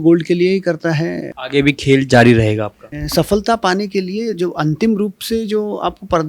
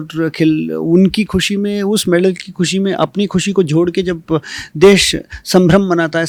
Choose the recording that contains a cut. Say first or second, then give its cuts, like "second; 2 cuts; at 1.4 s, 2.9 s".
first; 2 cuts; at 1.2 s, 2.8 s